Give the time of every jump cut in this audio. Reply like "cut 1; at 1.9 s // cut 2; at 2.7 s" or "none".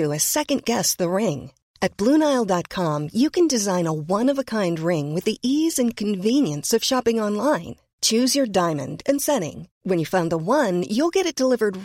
none